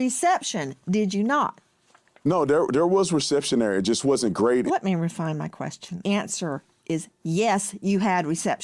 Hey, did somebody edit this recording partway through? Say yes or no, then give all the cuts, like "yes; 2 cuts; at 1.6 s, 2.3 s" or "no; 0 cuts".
yes; 2 cuts; at 4.7 s, 6.0 s